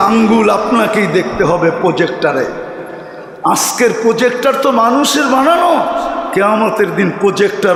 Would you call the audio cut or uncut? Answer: uncut